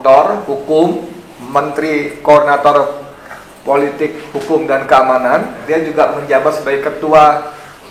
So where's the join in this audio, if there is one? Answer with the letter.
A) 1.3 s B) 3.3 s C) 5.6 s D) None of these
C